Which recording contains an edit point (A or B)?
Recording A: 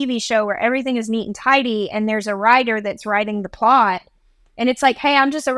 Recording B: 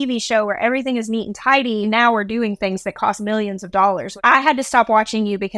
B